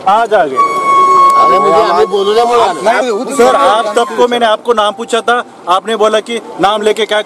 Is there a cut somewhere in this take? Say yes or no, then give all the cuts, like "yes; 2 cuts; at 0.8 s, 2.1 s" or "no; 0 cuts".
no; 0 cuts